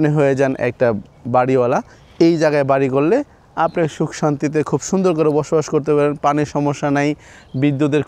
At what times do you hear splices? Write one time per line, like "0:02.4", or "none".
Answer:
none